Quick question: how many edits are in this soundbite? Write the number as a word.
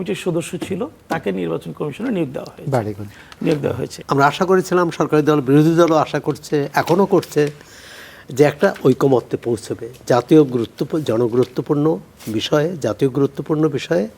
one